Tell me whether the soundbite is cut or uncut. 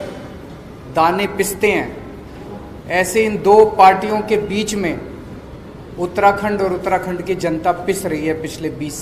uncut